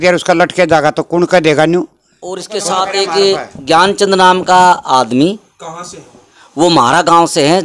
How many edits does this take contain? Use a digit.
1